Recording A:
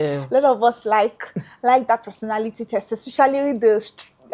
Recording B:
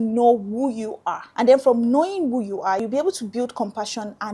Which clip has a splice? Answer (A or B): B